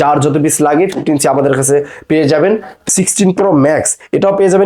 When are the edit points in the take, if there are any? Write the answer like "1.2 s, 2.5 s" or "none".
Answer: 2.7 s